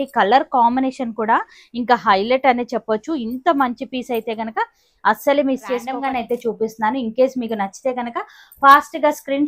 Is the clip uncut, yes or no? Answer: no